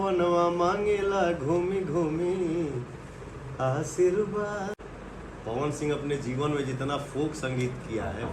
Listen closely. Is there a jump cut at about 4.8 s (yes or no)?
yes